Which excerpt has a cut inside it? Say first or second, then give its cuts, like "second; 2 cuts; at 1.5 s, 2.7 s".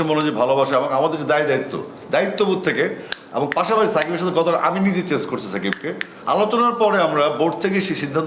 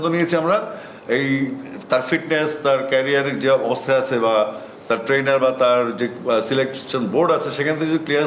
first; 1 cut; at 6.1 s